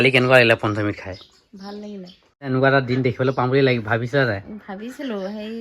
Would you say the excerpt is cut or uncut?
cut